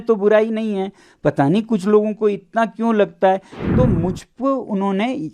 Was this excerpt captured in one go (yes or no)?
no